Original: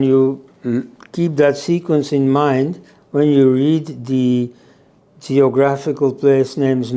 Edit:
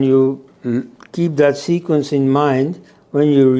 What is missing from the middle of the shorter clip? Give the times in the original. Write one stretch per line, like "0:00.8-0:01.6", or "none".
none